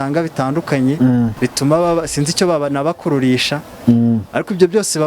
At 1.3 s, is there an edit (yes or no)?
yes